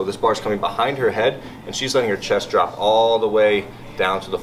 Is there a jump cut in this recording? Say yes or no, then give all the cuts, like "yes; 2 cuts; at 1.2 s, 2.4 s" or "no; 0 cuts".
no; 0 cuts